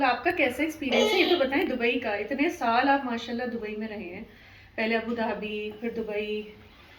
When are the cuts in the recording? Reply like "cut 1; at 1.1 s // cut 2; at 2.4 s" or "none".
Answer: none